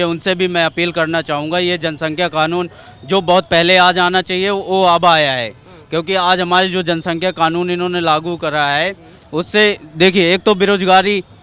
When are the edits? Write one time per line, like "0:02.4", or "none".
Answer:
none